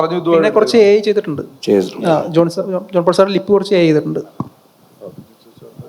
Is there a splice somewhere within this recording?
no; 0 cuts

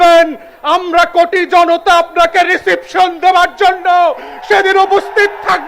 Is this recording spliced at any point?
no; 0 cuts

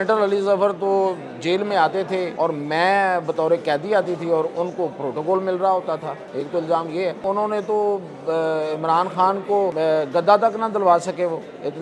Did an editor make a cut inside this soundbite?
yes; 4 cuts; at 2.3 s, 6.2 s, 7.2 s, 9.7 s

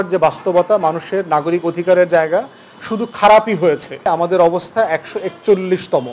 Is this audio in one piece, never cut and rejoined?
no; 1 cut; at 4.1 s

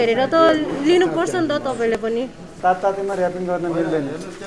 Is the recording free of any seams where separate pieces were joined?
no; 1 cut; at 2.5 s

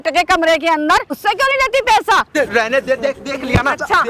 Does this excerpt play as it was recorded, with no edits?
no; 2 cuts; at 1.2 s, 2.3 s

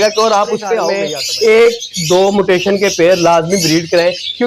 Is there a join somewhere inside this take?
yes; 1 cut; at 1.0 s

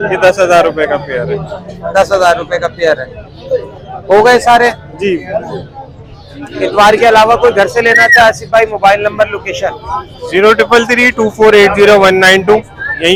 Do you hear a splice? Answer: no; 0 cuts

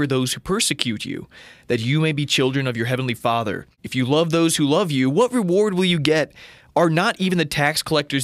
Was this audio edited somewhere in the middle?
yes; 1 cut; at 3.7 s

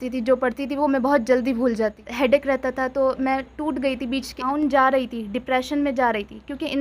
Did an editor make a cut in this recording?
yes; 2 cuts; at 2.0 s, 4.4 s

